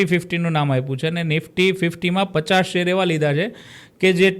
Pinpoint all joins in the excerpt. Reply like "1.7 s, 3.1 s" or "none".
none

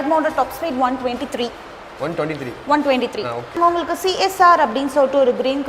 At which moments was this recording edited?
3.6 s

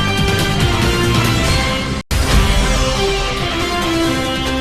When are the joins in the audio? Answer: 1.9 s

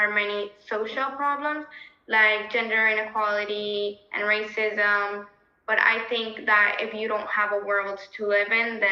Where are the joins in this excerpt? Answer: none

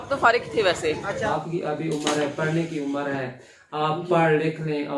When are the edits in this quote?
1.3 s

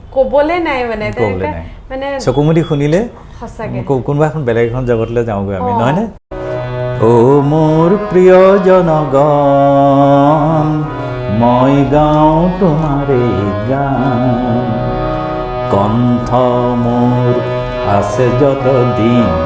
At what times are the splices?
6.3 s

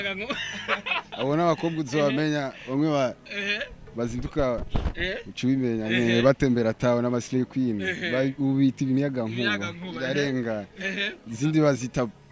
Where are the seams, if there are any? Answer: none

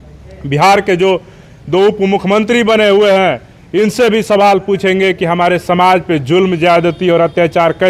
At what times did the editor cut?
none

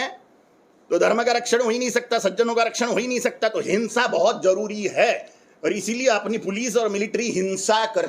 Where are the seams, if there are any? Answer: none

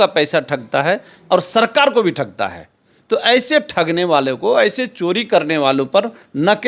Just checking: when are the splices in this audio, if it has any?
none

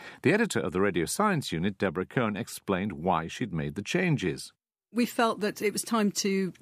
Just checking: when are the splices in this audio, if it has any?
3.9 s

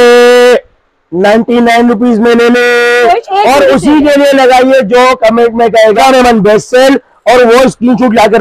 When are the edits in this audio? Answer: 3.3 s, 6.0 s

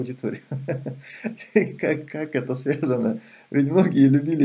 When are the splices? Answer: none

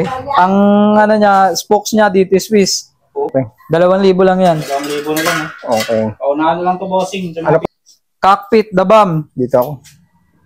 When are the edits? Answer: 3.3 s, 7.6 s

